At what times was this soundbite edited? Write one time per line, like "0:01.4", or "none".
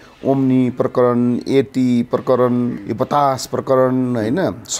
0:02.8